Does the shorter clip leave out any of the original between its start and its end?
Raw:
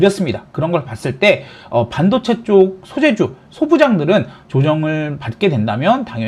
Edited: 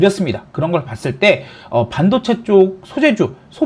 no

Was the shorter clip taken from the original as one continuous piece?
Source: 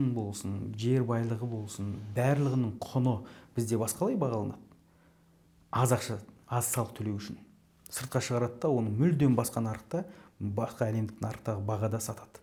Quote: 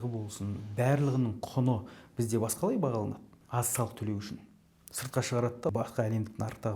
no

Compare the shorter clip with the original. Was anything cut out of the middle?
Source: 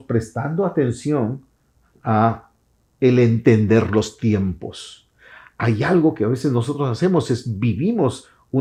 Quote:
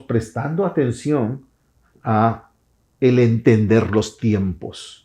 no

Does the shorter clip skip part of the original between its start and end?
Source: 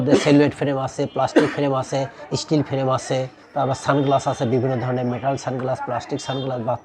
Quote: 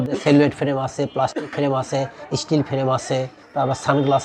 no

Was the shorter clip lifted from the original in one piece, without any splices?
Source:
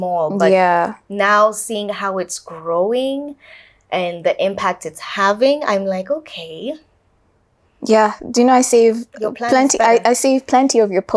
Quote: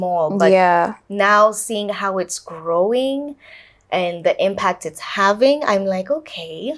yes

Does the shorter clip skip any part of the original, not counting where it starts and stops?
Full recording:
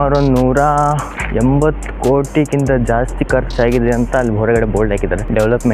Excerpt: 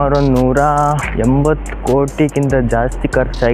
yes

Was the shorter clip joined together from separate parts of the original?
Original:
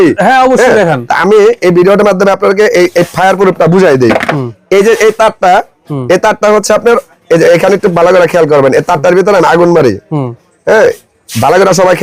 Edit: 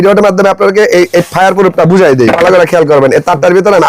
yes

